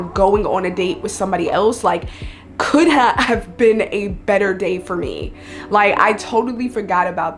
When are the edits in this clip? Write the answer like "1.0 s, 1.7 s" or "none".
none